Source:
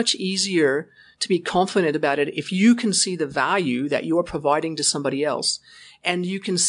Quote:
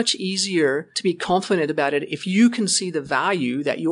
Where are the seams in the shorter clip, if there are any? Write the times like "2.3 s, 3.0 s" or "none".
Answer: 0.9 s